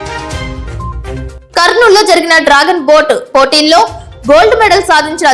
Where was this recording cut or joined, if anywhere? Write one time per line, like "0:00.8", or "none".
0:01.3